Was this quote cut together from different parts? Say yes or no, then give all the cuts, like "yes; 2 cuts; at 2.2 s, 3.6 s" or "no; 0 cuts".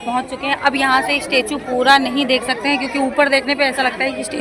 no; 0 cuts